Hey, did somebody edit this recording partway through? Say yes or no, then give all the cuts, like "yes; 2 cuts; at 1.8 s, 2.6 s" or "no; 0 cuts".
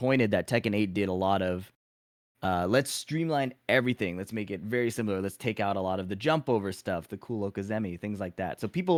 no; 0 cuts